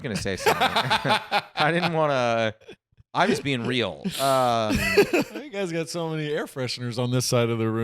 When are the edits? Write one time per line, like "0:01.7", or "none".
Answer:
0:05.4